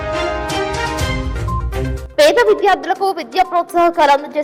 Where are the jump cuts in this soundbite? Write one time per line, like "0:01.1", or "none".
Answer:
0:01.9